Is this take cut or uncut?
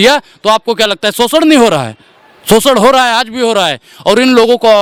uncut